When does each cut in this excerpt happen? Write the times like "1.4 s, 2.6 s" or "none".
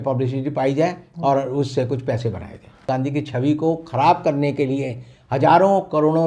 2.9 s